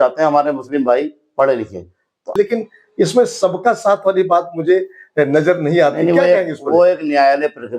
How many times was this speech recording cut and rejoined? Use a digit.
1